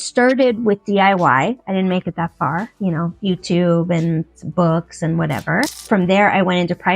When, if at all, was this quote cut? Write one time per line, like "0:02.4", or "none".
0:05.7